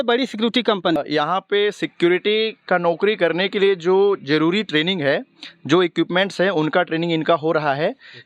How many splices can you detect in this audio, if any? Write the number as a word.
one